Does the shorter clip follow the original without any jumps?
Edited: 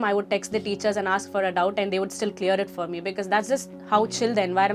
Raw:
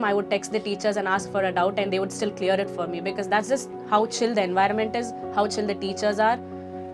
yes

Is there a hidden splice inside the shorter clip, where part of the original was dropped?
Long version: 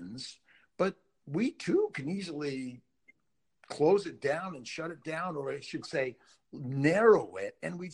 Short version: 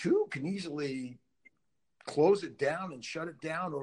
no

